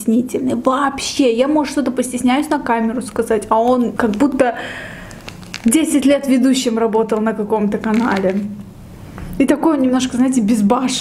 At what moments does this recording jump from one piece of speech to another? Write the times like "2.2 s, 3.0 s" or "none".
none